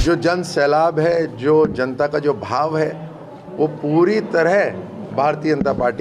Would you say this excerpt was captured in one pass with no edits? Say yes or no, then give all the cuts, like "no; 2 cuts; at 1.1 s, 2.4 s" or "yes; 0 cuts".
yes; 0 cuts